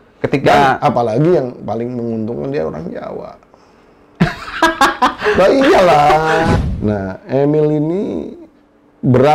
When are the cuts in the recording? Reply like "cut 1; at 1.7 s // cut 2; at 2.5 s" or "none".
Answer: cut 1; at 6.6 s